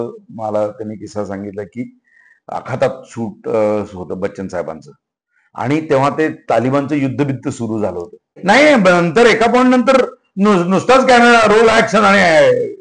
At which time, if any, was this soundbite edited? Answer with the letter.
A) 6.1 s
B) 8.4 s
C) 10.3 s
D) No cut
B